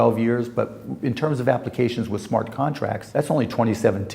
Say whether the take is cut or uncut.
cut